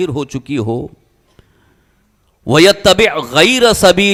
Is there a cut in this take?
no; 0 cuts

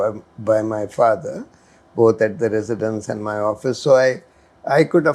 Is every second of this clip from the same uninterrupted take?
yes; 0 cuts

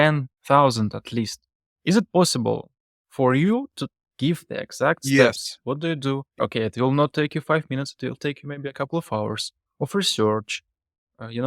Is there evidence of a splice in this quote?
yes; 1 cut; at 6.4 s

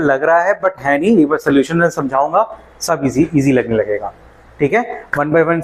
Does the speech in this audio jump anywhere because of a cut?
no; 0 cuts

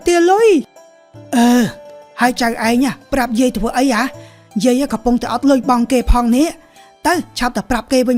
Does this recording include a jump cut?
no; 0 cuts

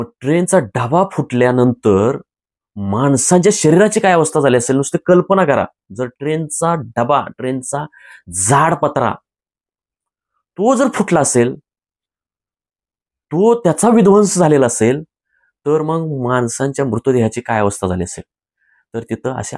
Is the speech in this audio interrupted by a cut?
no; 0 cuts

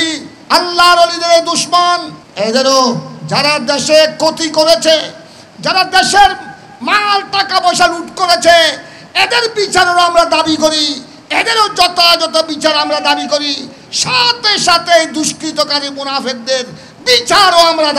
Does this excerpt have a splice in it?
yes; 1 cut; at 2.2 s

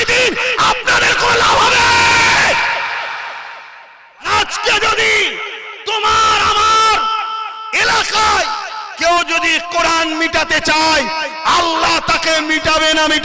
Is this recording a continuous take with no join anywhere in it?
no; 1 cut; at 4.3 s

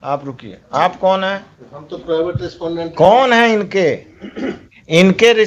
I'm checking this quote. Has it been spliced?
no; 0 cuts

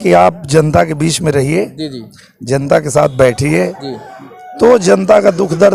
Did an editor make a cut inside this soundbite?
no; 0 cuts

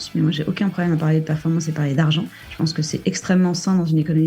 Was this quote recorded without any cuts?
yes; 0 cuts

